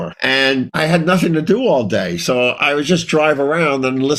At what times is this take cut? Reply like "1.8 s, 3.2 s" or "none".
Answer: none